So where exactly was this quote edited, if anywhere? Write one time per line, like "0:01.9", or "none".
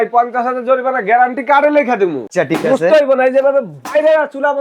0:02.3